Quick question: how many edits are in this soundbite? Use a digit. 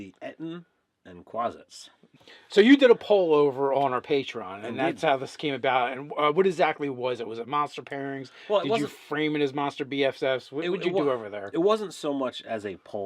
1